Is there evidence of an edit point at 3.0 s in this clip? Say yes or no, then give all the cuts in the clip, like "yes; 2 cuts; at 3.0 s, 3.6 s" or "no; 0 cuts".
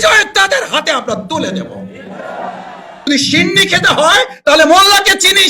yes; 1 cut; at 3.0 s